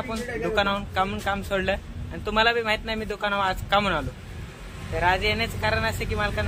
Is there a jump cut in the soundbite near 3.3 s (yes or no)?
no